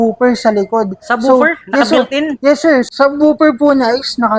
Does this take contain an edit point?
yes; 1 cut; at 2.9 s

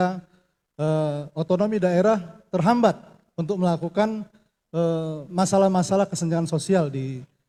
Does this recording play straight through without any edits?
yes; 0 cuts

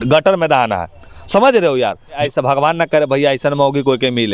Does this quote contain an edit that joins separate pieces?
yes; 1 cut; at 2.2 s

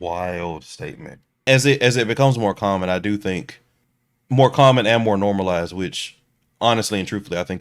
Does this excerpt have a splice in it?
yes; 1 cut; at 1.4 s

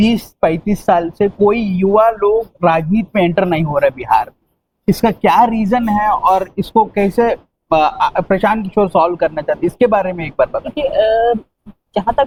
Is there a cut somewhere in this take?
no; 0 cuts

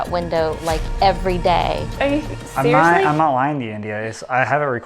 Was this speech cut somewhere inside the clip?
yes; 1 cut; at 2.0 s

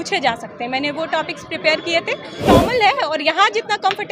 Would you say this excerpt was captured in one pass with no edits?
no; 1 cut; at 2.4 s

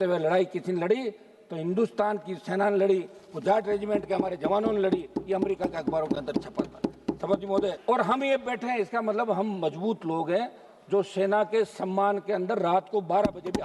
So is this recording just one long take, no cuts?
no; 1 cut; at 7.8 s

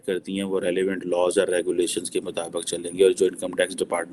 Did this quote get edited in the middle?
no; 0 cuts

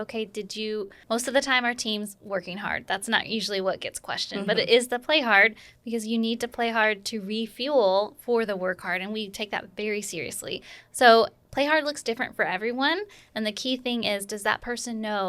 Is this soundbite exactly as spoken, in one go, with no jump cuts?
no; 1 cut; at 1.0 s

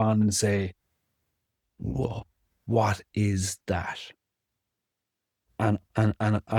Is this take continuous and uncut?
yes; 0 cuts

